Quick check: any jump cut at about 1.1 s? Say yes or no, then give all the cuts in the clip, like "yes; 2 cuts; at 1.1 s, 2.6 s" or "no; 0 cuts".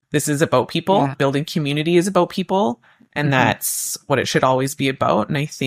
yes; 1 cut; at 1.1 s